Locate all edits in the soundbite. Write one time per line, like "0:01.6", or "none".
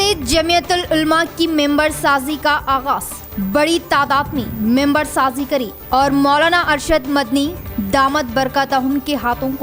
none